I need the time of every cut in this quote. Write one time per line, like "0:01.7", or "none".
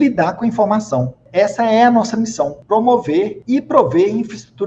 0:01.2
0:02.6
0:03.4